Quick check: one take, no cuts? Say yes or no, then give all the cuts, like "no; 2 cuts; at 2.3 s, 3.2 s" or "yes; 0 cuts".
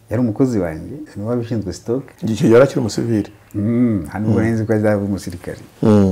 no; 2 cuts; at 1.1 s, 2.1 s